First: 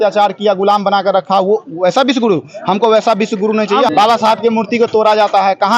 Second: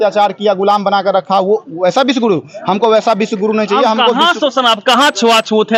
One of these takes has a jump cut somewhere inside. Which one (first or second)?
first